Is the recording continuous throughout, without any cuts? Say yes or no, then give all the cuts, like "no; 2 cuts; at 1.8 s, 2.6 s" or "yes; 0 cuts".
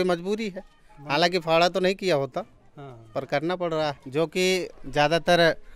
no; 1 cut; at 4.0 s